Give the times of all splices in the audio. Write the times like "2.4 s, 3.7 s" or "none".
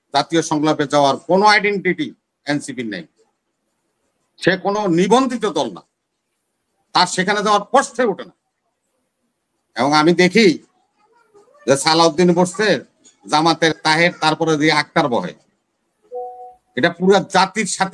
none